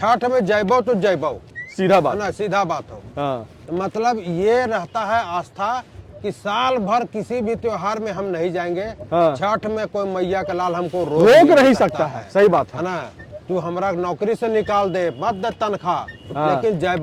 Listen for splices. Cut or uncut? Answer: uncut